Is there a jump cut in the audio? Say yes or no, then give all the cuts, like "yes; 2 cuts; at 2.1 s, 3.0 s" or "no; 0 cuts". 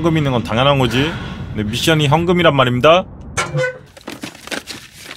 no; 0 cuts